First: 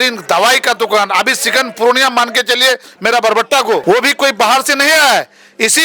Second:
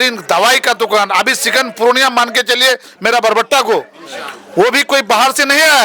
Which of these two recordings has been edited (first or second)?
first